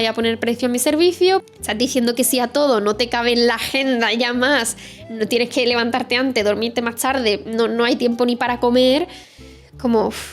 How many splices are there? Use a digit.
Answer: 1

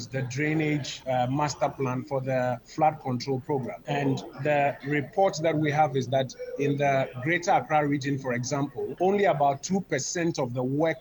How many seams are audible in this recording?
4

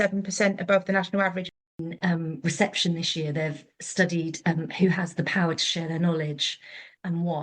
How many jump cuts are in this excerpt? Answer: 1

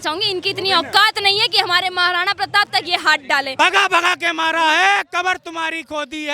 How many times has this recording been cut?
1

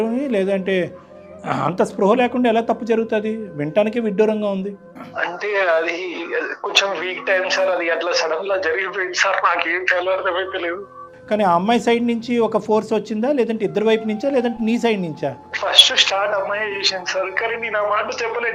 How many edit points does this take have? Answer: 0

